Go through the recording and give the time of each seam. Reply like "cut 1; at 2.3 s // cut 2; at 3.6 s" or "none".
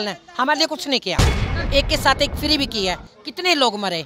cut 1; at 1.5 s